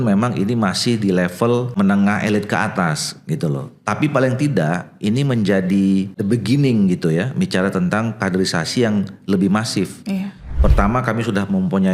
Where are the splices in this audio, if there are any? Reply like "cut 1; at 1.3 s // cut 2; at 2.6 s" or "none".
cut 1; at 1.8 s // cut 2; at 6.2 s // cut 3; at 10.6 s

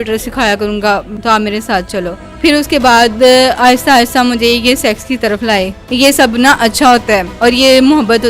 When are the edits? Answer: cut 1; at 1.1 s // cut 2; at 2.2 s // cut 3; at 5.8 s // cut 4; at 7.3 s

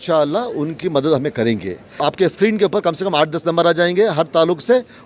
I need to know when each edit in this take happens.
cut 1; at 2.0 s

